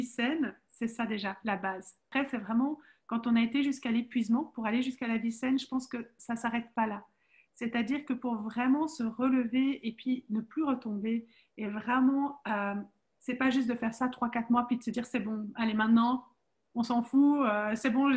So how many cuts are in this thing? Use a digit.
1